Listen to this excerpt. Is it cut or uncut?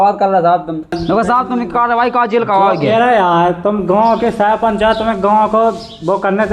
cut